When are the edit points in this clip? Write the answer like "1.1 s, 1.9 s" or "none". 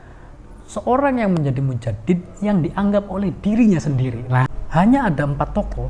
4.4 s